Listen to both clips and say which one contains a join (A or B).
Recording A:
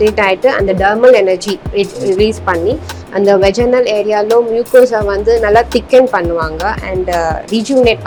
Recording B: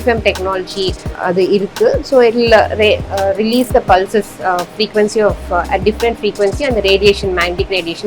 B